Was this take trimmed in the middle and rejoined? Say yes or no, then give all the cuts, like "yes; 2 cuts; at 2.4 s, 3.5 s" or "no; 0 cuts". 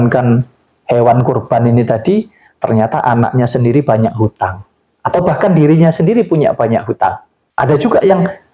no; 0 cuts